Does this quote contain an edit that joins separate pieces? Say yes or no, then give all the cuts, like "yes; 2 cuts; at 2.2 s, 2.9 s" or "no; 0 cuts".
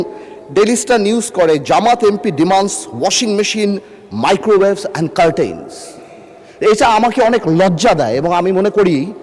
no; 0 cuts